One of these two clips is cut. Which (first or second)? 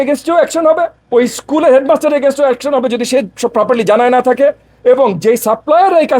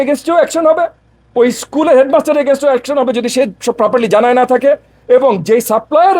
first